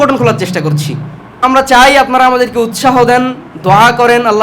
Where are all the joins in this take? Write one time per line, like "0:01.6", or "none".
0:01.4

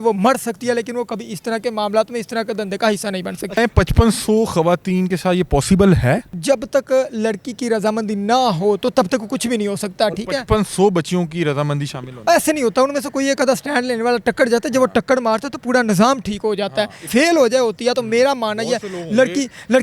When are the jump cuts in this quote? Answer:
0:03.6
0:06.3
0:17.0

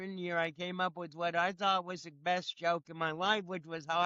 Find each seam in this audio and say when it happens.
none

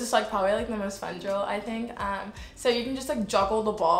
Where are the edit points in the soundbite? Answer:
none

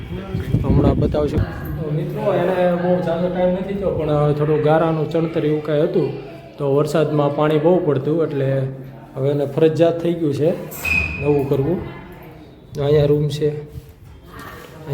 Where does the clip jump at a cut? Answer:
0:01.4

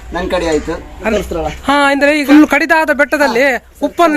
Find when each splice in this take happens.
0:01.1
0:02.2

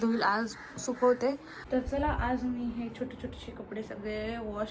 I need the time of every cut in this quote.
0:01.5

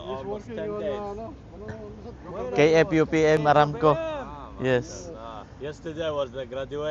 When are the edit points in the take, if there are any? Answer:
0:03.4

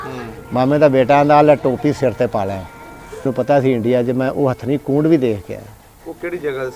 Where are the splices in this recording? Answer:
0:03.2

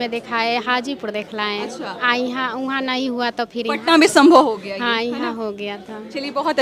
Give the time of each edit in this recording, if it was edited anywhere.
none

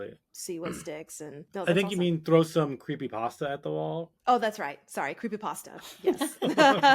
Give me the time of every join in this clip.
0:01.4

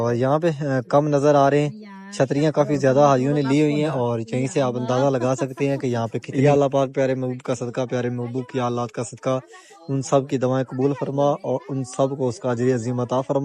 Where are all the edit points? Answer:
0:06.2

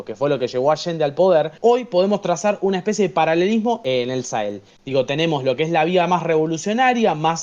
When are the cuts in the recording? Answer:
0:01.5
0:03.8

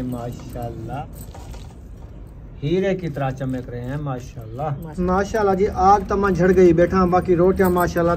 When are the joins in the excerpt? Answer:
0:01.0
0:04.9

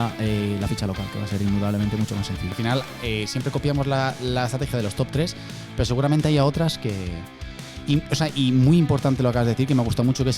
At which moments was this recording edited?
0:02.6

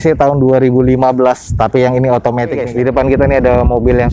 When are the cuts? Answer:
0:02.6

